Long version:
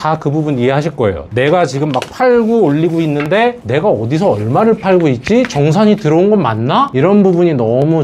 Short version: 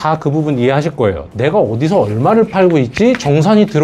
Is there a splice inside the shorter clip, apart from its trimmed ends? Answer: yes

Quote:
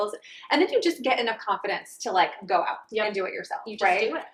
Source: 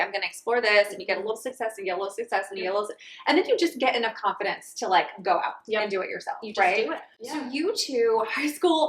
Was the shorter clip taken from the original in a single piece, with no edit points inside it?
yes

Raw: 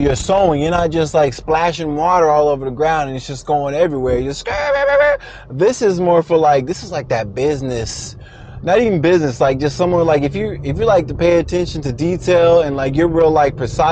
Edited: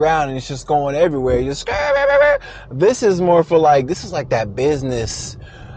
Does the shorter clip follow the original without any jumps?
yes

